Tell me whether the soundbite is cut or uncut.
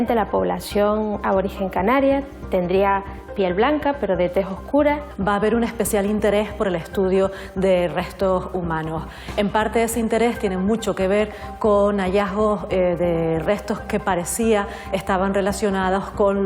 cut